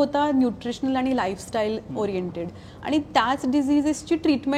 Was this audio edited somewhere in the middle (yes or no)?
no